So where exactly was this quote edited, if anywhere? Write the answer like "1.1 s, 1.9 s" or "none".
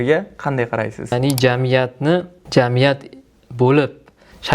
1.1 s